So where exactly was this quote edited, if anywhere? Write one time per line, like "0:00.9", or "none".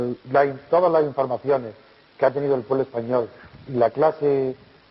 0:01.6